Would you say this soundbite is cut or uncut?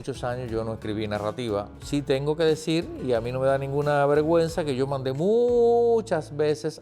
cut